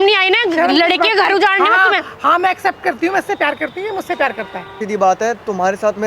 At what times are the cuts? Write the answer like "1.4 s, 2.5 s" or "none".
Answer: 4.8 s